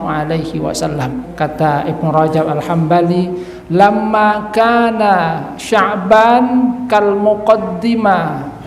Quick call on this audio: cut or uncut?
cut